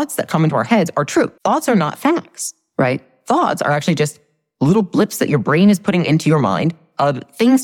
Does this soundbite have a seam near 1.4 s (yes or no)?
yes